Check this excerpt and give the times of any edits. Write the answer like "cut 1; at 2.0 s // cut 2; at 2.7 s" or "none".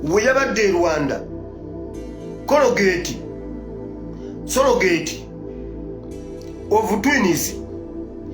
cut 1; at 3.1 s // cut 2; at 4.5 s // cut 3; at 5.1 s // cut 4; at 6.7 s